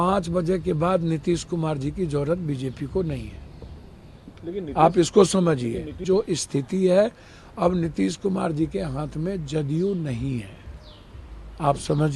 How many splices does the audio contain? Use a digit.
1